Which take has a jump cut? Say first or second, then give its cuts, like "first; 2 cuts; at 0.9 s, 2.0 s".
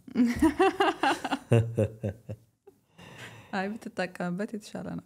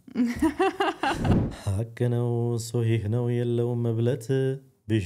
second; 1 cut; at 1.3 s